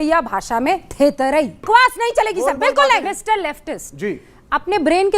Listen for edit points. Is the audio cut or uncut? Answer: cut